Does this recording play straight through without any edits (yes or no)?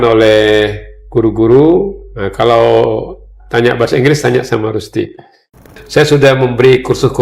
no